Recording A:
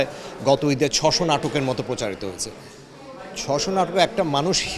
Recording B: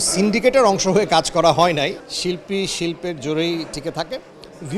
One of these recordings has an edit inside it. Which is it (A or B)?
B